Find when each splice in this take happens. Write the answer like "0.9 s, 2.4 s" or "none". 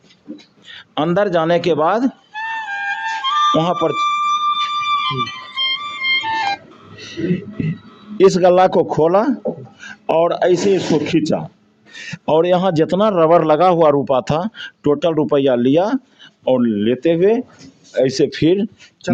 none